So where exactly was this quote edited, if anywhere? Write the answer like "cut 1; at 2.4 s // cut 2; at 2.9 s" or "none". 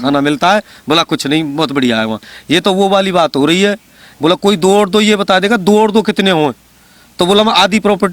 cut 1; at 2.2 s